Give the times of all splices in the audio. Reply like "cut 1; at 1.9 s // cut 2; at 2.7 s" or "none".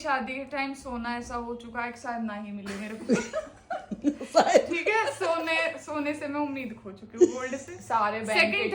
none